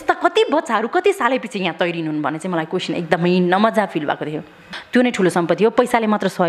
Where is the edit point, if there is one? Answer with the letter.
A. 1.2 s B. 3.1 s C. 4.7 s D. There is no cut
C